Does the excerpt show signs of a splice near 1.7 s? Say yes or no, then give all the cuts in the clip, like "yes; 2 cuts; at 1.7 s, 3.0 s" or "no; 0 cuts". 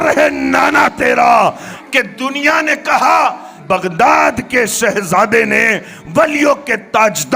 yes; 1 cut; at 1.7 s